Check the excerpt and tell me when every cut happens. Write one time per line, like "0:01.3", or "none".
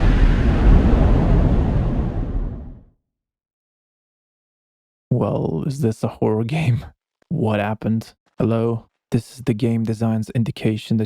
0:08.9